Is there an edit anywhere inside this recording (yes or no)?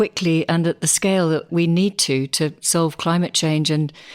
yes